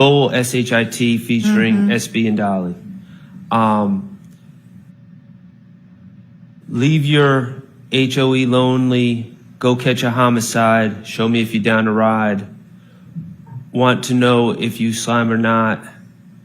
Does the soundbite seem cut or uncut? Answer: uncut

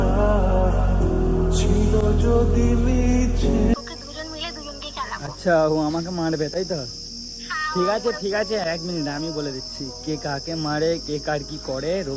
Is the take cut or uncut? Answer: uncut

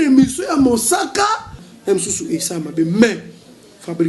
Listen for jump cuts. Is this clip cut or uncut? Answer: cut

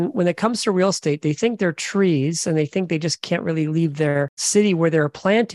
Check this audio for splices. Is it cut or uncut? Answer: cut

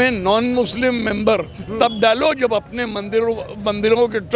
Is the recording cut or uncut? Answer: uncut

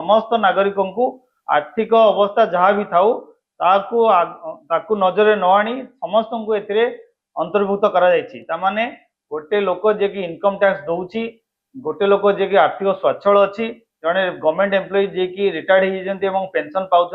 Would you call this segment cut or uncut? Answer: uncut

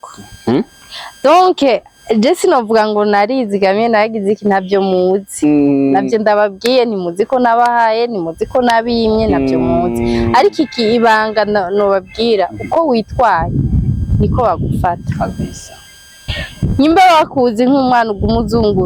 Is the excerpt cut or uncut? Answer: uncut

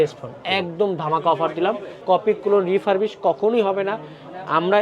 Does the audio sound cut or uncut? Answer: cut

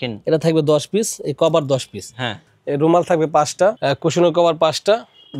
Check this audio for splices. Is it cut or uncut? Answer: cut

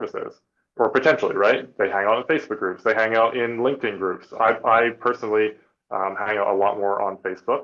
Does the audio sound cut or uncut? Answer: uncut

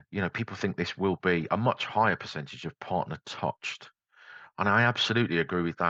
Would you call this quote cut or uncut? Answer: uncut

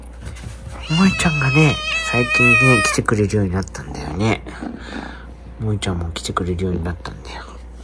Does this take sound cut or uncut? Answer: uncut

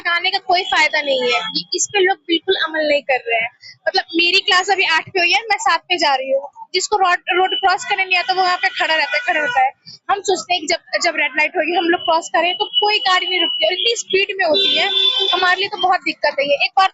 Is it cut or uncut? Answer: uncut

